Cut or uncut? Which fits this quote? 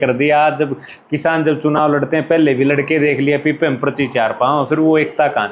uncut